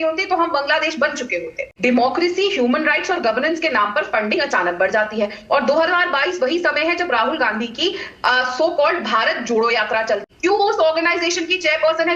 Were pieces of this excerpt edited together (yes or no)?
yes